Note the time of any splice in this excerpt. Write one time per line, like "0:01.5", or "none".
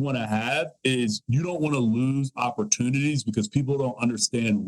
none